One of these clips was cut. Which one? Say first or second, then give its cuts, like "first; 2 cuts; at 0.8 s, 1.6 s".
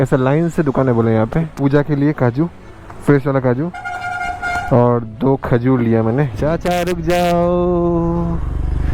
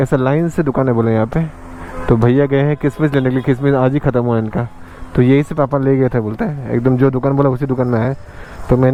first; 2 cuts; at 1.5 s, 6.4 s